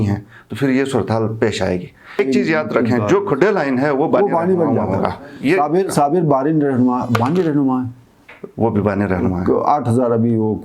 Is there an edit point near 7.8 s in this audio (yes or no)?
no